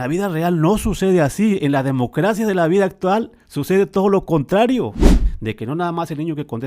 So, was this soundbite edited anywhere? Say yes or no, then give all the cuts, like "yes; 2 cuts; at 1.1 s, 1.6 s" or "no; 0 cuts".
yes; 1 cut; at 5.0 s